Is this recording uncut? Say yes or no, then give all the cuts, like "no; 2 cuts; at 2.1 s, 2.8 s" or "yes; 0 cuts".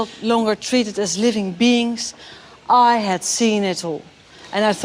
no; 1 cut; at 1.5 s